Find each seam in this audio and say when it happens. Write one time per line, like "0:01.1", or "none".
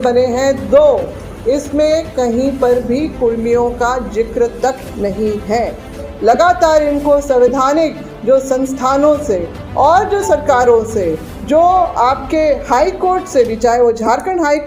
0:06.1